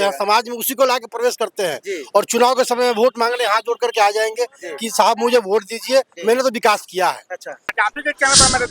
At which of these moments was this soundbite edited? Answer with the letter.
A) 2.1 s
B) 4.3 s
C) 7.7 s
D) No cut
C